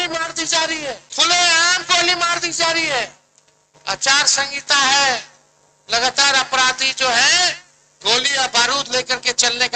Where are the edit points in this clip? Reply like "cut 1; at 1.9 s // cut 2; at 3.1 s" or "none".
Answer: cut 1; at 1.1 s